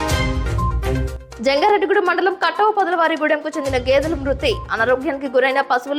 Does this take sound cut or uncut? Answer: cut